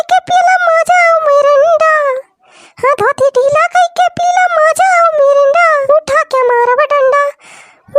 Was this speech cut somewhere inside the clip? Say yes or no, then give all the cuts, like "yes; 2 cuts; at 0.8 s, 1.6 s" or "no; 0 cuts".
yes; 1 cut; at 5.8 s